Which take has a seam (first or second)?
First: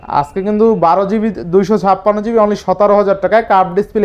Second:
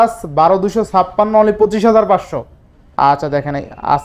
second